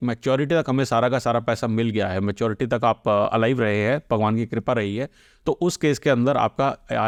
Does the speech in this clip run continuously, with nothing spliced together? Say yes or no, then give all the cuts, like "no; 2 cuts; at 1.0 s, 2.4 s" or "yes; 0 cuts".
yes; 0 cuts